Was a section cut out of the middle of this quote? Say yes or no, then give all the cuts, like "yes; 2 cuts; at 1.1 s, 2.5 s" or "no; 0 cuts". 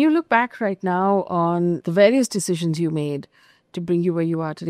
yes; 1 cut; at 1.8 s